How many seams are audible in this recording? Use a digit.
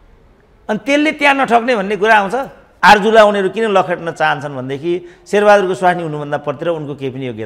1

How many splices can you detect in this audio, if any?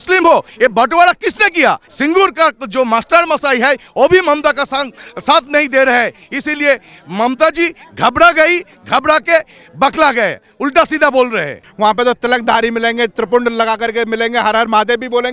2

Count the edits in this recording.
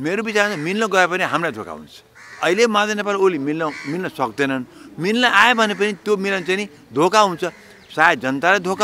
1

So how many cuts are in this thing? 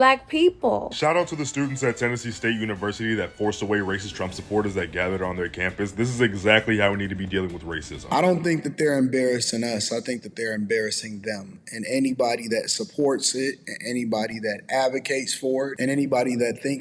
3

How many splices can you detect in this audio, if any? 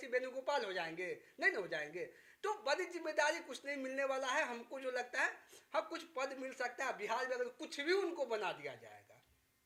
0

